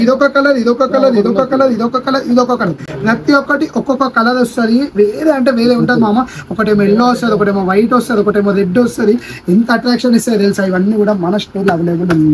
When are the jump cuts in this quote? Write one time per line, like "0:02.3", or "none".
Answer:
none